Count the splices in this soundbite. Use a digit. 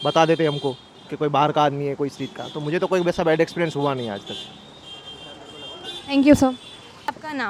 0